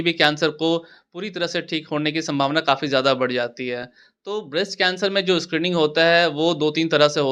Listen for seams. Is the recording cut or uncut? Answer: uncut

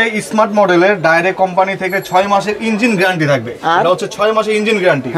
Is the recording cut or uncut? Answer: uncut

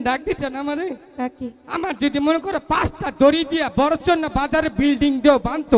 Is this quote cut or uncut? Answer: uncut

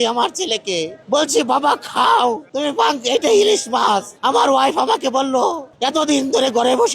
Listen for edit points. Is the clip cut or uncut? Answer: cut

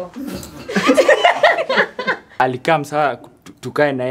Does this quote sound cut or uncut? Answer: cut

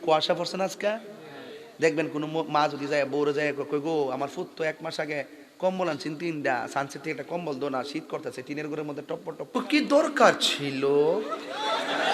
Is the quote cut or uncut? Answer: cut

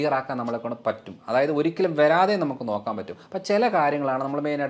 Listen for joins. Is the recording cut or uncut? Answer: uncut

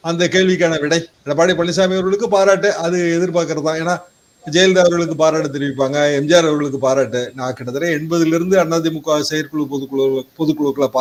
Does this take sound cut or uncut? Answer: uncut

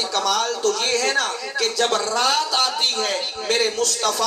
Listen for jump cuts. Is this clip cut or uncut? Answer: uncut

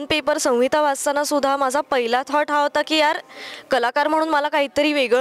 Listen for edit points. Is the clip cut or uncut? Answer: uncut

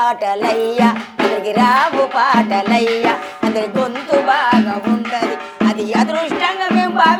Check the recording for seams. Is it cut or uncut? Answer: uncut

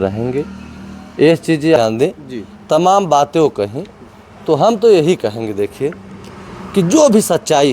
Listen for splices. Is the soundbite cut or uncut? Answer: cut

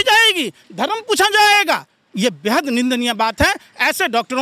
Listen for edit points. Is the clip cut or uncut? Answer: uncut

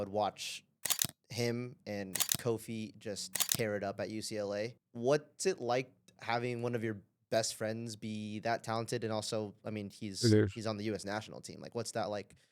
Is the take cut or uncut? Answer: cut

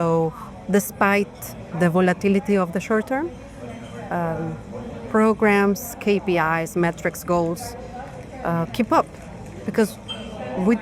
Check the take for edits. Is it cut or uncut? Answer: uncut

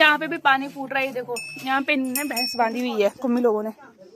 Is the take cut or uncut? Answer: uncut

